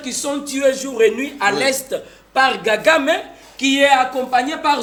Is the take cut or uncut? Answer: uncut